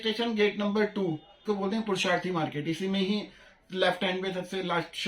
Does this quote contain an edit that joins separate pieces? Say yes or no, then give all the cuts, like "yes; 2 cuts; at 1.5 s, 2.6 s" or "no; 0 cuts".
yes; 1 cut; at 1.4 s